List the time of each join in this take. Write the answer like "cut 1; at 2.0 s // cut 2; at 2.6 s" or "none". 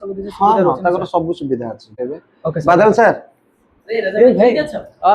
cut 1; at 2.0 s